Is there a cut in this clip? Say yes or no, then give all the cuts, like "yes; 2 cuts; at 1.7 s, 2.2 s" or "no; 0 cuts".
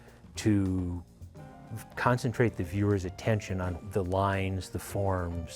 yes; 1 cut; at 3.8 s